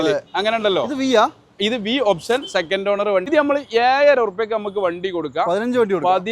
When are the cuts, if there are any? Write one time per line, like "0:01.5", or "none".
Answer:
0:03.2